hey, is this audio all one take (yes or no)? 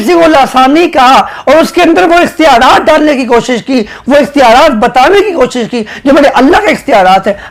yes